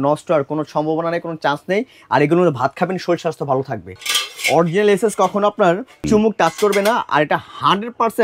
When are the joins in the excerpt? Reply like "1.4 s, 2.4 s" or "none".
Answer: 4.0 s, 5.9 s